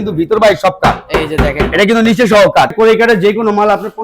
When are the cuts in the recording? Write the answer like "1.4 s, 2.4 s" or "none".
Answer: 2.7 s